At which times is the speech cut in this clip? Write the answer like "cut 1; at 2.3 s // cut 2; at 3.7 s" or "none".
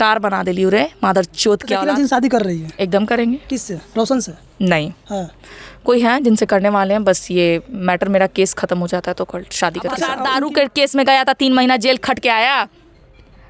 cut 1; at 1.7 s // cut 2; at 10.2 s